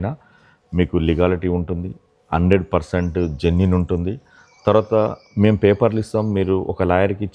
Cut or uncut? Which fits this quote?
uncut